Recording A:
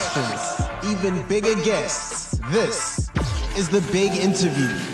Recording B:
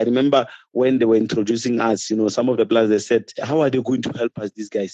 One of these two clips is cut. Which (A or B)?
B